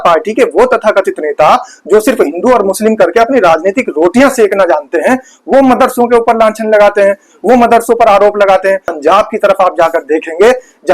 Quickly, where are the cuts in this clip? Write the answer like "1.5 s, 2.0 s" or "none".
8.9 s